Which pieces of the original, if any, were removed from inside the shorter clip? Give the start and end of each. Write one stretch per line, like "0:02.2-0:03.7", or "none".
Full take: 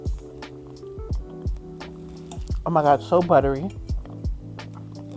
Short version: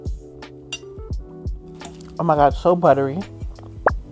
0:02.1-0:02.6